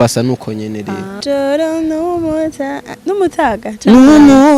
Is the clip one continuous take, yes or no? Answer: no